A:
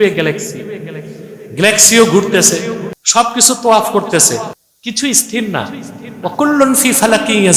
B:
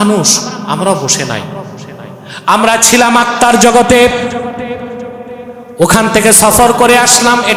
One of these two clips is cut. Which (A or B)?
A